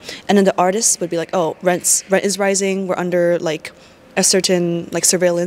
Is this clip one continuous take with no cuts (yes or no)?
yes